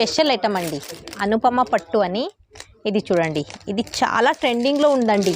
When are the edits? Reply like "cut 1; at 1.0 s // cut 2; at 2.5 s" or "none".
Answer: none

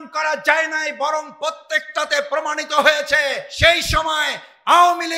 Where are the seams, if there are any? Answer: cut 1; at 3.5 s

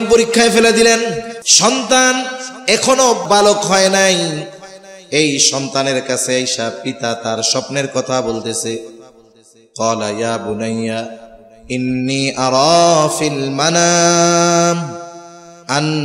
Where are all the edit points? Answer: cut 1; at 1.4 s // cut 2; at 3.2 s

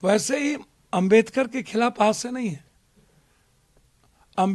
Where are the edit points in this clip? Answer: none

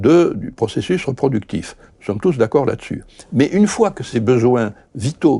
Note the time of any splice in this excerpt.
cut 1; at 4.1 s

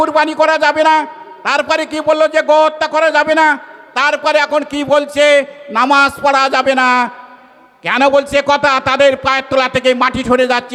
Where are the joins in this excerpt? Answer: none

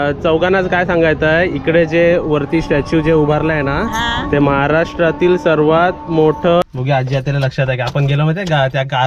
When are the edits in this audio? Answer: cut 1; at 6.6 s

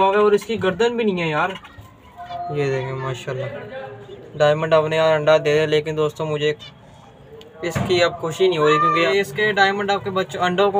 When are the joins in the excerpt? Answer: cut 1; at 2.2 s // cut 2; at 9.1 s

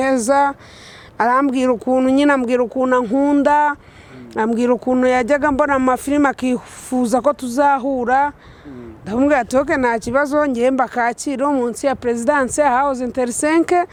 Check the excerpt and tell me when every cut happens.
none

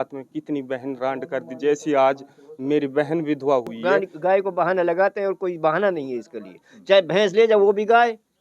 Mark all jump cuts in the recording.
cut 1; at 3.8 s

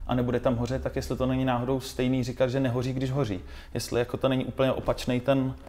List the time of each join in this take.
none

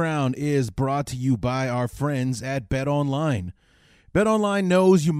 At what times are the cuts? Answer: none

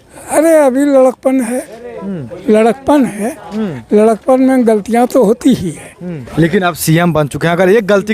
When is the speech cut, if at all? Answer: cut 1; at 6.2 s

